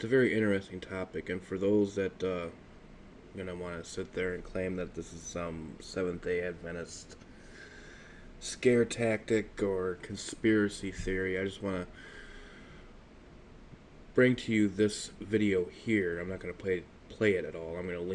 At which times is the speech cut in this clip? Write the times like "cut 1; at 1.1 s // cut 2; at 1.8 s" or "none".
none